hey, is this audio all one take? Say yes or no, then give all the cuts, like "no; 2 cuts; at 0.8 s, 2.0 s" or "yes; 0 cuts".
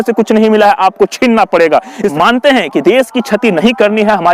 no; 1 cut; at 2.1 s